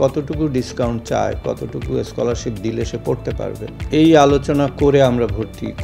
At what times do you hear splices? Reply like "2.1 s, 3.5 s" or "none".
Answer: 3.7 s